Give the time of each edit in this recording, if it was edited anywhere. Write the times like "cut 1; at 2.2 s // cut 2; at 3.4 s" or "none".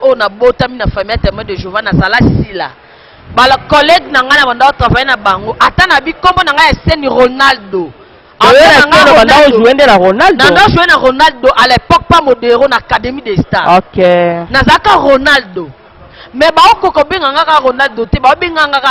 none